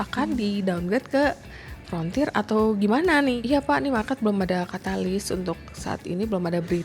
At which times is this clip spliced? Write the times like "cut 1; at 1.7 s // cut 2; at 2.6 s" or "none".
cut 1; at 3.4 s